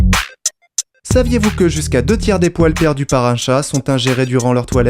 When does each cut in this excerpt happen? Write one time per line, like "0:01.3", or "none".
0:01.1